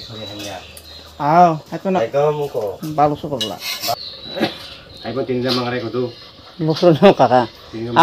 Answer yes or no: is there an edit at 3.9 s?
yes